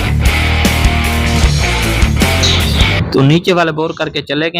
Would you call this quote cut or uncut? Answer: uncut